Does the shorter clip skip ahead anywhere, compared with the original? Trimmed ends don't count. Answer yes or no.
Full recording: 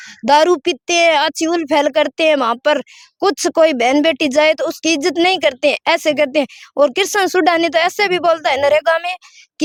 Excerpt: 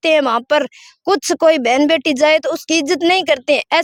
no